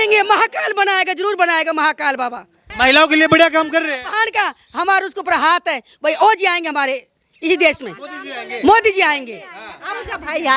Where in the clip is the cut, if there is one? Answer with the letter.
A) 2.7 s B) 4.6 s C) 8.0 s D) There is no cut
D